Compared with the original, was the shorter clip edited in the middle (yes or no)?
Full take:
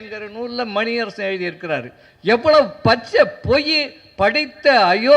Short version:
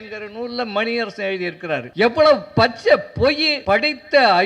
yes